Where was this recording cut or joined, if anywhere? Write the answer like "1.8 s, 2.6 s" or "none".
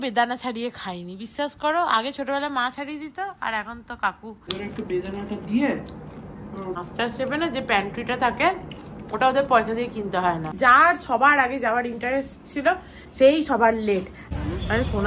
4.5 s, 6.8 s, 10.5 s, 14.2 s